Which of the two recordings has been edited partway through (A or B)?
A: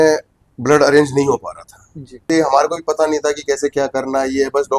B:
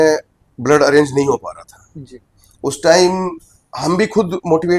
A